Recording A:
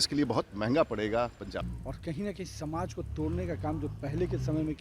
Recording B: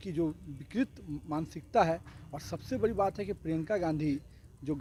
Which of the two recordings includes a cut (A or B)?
A